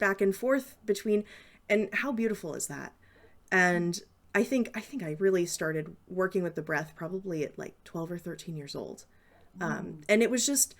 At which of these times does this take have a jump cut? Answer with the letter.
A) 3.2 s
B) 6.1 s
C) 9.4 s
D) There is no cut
D